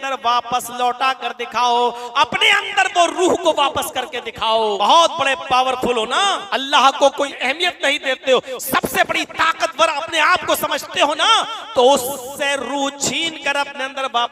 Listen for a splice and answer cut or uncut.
cut